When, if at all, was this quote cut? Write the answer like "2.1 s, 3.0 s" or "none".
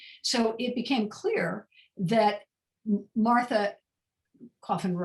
none